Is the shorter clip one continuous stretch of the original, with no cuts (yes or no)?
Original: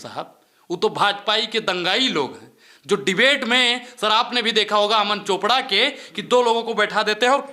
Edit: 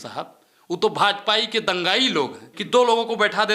no